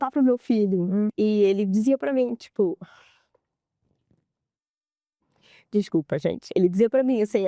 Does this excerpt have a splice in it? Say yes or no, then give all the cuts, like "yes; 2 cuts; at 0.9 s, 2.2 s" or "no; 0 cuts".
yes; 1 cut; at 1.1 s